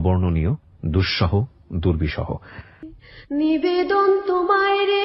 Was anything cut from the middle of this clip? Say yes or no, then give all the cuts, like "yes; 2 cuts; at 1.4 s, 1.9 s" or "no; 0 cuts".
yes; 1 cut; at 2.7 s